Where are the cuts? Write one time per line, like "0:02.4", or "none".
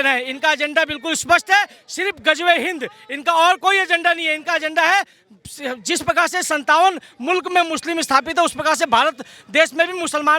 none